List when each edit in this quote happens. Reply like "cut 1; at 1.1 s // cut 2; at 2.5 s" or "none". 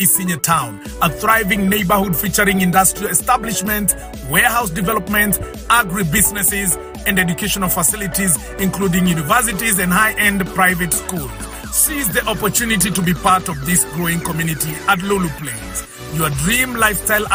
none